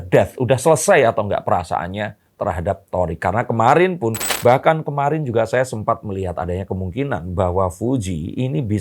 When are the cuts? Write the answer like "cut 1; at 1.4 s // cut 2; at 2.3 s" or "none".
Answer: cut 1; at 4.3 s

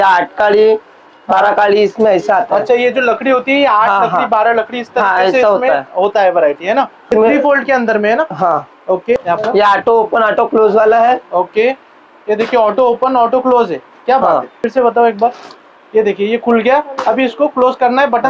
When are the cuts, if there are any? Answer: cut 1; at 7.1 s // cut 2; at 9.2 s // cut 3; at 14.6 s

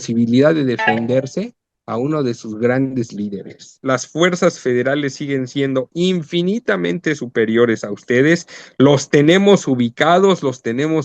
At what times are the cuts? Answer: cut 1; at 3.8 s

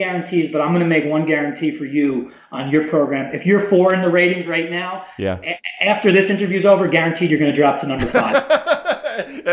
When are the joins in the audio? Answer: cut 1; at 8.1 s

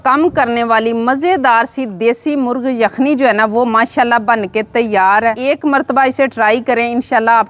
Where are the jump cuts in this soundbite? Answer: cut 1; at 5.4 s

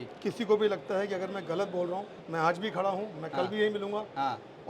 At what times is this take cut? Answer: cut 1; at 2.2 s

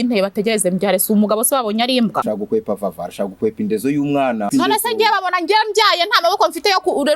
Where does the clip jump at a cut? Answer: cut 1; at 2.2 s // cut 2; at 4.5 s

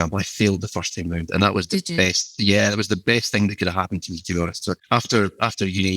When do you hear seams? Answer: cut 1; at 4.8 s

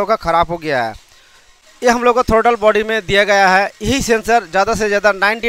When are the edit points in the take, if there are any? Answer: cut 1; at 1.5 s

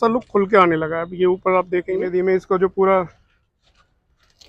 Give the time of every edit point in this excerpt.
cut 1; at 1.9 s

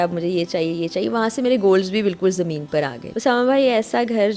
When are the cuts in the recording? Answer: cut 1; at 3.0 s

